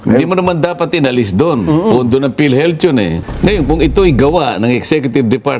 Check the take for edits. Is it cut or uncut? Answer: cut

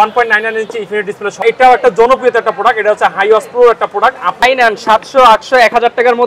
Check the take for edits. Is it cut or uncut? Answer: cut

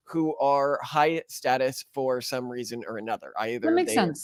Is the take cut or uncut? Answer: uncut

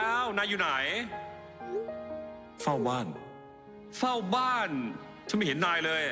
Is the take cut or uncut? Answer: uncut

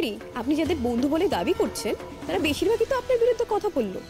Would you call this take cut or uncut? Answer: uncut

